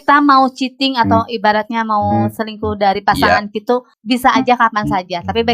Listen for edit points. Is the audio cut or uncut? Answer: cut